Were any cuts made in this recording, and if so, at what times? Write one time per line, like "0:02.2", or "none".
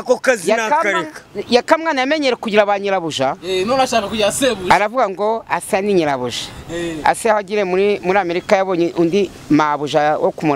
none